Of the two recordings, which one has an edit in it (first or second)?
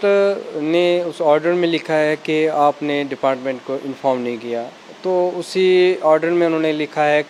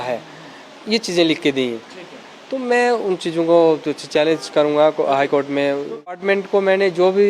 second